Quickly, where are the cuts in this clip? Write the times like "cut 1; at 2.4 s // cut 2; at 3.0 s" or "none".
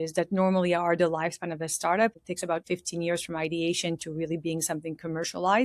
cut 1; at 2.4 s